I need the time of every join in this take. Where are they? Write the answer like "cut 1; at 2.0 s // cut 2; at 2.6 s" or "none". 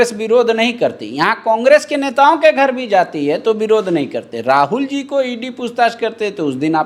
none